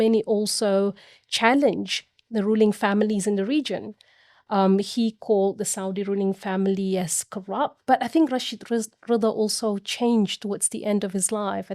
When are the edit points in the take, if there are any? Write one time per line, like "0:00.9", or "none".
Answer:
0:07.8